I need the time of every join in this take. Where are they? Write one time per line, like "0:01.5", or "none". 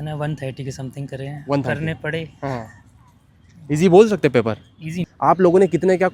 0:05.1